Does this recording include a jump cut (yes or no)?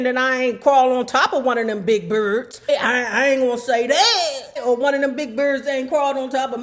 yes